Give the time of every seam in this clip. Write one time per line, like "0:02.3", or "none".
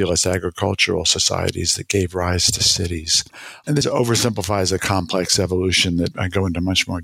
none